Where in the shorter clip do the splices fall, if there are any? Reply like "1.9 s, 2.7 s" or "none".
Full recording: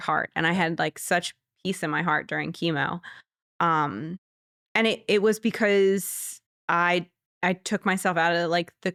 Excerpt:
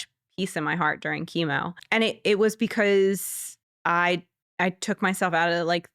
1.8 s